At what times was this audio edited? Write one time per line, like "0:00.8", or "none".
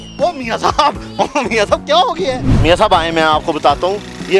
0:02.5